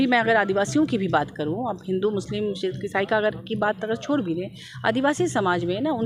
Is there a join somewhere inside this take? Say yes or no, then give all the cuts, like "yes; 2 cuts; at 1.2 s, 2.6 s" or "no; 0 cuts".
no; 0 cuts